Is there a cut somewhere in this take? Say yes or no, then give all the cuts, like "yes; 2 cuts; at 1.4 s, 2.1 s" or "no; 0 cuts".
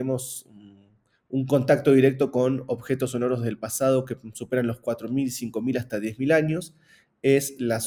no; 0 cuts